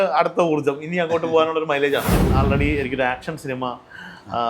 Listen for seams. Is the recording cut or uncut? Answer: cut